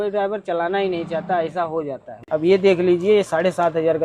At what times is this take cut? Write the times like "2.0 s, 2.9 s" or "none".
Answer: 2.2 s